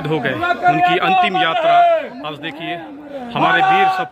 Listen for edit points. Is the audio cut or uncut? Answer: uncut